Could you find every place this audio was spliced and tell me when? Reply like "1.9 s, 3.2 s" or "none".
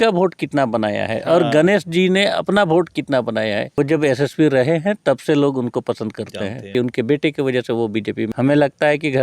3.8 s, 6.7 s, 8.3 s